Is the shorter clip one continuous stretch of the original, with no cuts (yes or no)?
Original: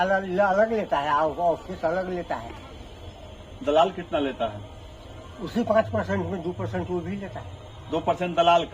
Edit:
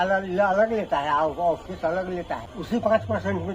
no